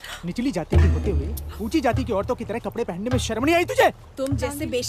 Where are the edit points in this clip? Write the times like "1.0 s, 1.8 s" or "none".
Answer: none